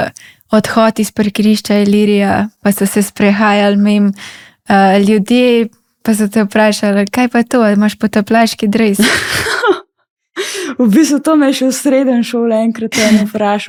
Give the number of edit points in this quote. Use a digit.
0